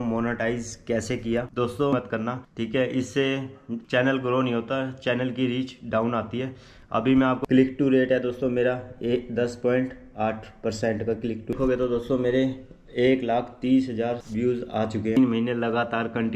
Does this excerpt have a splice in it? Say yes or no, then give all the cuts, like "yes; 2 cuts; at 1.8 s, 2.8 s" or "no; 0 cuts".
yes; 4 cuts; at 1.9 s, 7.4 s, 11.5 s, 15.2 s